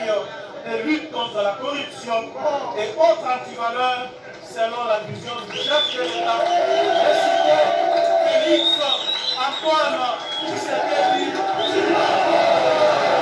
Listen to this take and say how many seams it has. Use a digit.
0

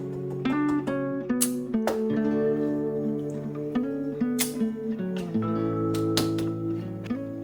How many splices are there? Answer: 0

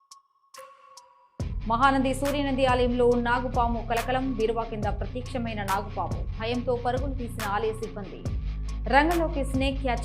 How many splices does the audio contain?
1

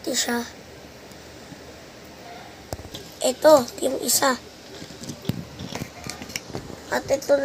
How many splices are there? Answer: 1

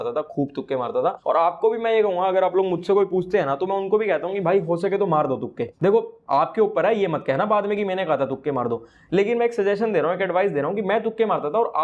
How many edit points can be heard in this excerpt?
0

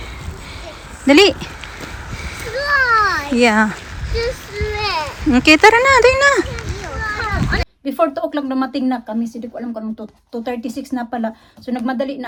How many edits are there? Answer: 0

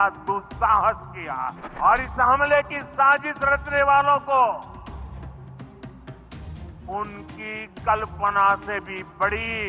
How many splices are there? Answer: 1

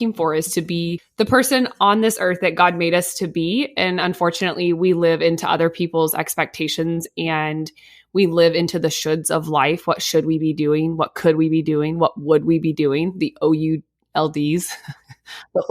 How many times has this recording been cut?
1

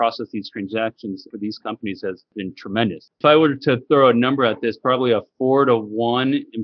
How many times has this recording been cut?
2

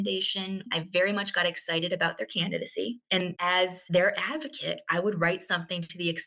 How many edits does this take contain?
1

